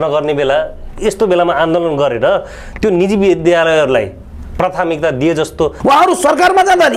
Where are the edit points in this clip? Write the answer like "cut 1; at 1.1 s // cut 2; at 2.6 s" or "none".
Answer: cut 1; at 5.8 s